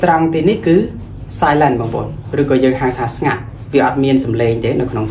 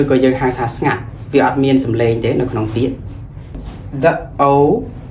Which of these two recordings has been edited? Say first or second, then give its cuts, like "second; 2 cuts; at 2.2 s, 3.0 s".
second; 1 cut; at 3.7 s